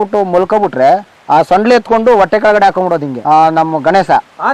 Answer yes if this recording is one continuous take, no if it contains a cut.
no